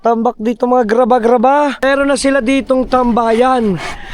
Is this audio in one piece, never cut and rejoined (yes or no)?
no